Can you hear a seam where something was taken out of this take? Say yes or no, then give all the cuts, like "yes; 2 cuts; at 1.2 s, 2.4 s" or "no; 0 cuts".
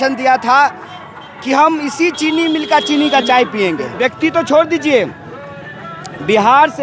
yes; 1 cut; at 3.9 s